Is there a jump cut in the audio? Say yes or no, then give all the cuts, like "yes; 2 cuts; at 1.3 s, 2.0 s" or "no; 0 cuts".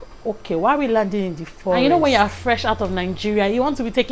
yes; 1 cut; at 1.8 s